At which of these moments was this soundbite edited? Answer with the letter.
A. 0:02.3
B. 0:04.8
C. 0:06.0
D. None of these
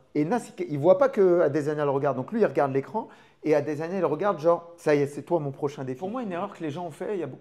C